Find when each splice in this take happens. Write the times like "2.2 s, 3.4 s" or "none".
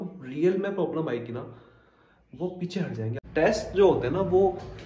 3.1 s